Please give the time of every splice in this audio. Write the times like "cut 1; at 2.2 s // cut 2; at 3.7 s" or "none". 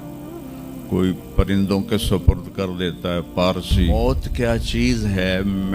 cut 1; at 3.9 s